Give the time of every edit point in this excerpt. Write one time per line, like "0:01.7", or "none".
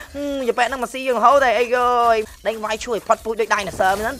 0:02.3